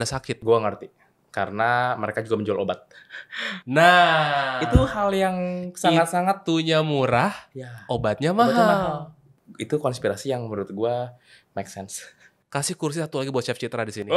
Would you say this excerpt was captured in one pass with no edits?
yes; 0 cuts

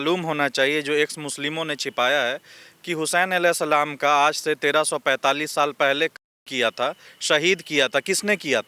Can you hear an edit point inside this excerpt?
no; 0 cuts

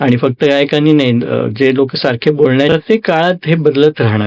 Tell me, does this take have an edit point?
yes; 1 cut; at 2.7 s

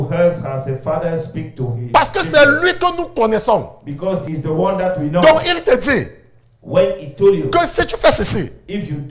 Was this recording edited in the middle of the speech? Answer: yes; 1 cut; at 4.3 s

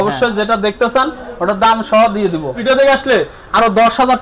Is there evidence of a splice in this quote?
yes; 1 cut; at 2.6 s

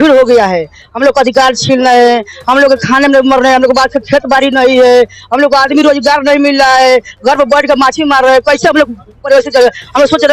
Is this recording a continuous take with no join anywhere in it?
yes; 0 cuts

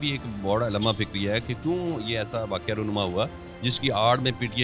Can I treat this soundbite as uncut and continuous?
yes; 0 cuts

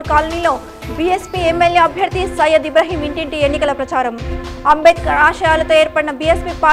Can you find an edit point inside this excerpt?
no; 0 cuts

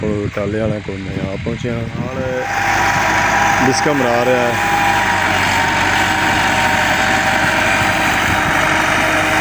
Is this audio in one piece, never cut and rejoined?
no; 1 cut; at 2.2 s

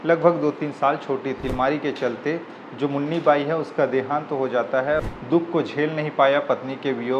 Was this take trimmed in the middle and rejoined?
yes; 2 cuts; at 1.5 s, 5.0 s

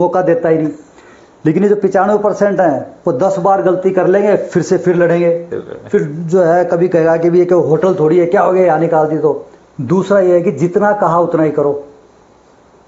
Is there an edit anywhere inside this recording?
yes; 1 cut; at 9.5 s

